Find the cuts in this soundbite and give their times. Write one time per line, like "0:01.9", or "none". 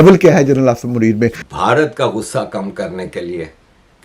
0:01.4